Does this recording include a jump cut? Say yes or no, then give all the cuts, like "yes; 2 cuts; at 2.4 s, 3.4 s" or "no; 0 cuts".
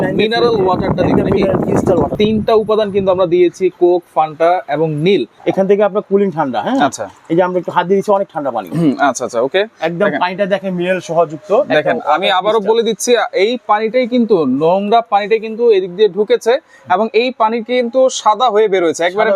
yes; 2 cuts; at 2.1 s, 5.3 s